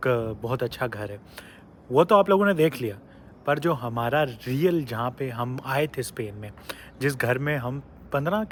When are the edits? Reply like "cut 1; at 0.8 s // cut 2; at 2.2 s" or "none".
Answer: none